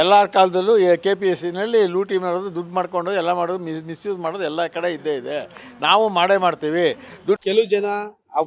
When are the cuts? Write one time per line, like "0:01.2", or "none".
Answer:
0:07.4